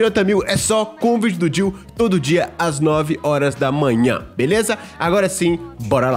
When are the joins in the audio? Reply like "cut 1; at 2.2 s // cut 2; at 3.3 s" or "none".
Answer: none